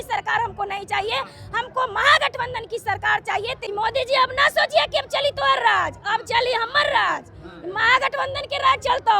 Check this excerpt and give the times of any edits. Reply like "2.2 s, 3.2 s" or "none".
3.6 s